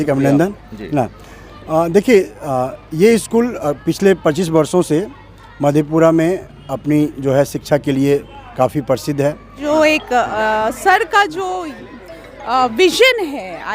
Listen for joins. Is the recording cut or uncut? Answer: cut